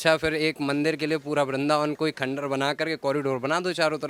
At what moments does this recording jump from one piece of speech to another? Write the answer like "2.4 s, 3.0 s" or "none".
none